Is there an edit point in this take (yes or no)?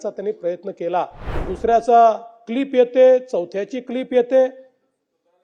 yes